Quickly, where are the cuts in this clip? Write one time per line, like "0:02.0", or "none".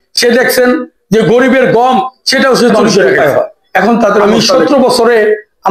0:04.2